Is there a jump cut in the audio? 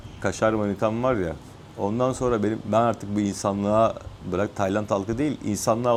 no; 0 cuts

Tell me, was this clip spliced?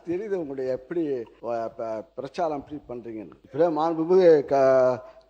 yes; 2 cuts; at 1.3 s, 3.4 s

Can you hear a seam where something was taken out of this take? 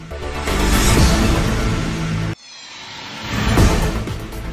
no; 0 cuts

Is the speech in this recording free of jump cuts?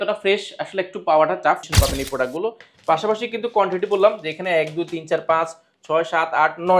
no; 1 cut; at 1.7 s

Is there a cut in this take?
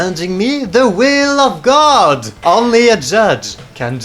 no; 0 cuts

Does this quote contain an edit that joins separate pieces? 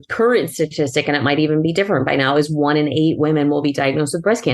no; 0 cuts

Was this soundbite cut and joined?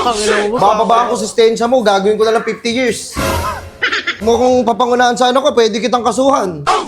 yes; 1 cut; at 4.2 s

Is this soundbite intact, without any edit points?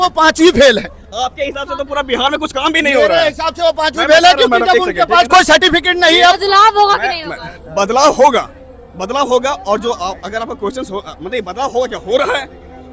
yes; 0 cuts

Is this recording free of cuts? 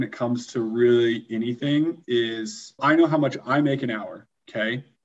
no; 1 cut; at 2.8 s

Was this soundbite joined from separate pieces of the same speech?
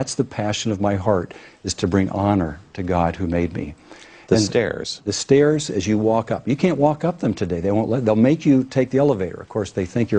no; 0 cuts

